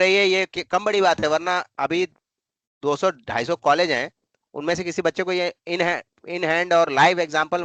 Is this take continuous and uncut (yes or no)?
yes